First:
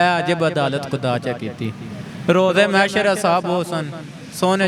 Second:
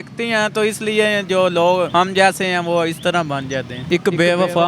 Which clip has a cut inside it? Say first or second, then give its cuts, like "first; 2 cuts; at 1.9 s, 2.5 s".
second; 2 cuts; at 1.9 s, 3.8 s